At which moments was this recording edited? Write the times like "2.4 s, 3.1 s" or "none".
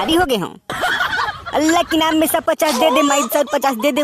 1.3 s